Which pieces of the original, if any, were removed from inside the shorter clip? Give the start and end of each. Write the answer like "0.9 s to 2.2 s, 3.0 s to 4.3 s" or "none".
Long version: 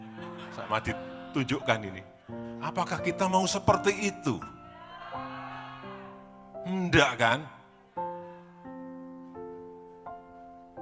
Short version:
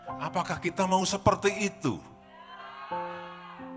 5.0 s to 7.6 s